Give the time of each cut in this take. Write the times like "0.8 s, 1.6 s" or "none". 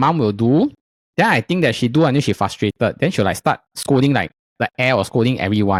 none